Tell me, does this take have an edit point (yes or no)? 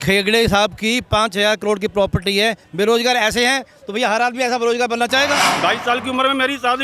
yes